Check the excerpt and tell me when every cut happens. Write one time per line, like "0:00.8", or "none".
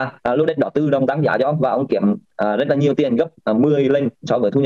none